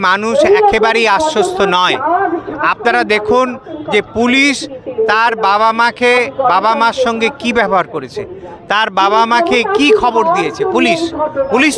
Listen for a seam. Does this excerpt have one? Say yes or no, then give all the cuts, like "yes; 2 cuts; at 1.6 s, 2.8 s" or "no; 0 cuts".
no; 0 cuts